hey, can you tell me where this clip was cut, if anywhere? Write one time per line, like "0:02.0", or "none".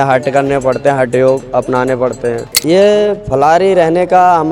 0:02.5